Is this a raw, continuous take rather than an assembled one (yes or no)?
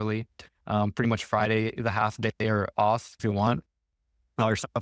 no